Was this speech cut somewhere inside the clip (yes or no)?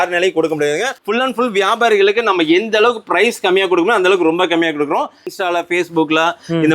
yes